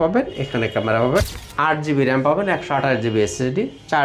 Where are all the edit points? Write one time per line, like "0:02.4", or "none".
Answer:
0:01.3